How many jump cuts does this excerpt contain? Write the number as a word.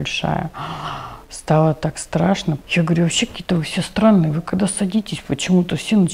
one